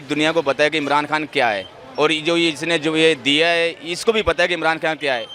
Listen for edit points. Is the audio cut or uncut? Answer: uncut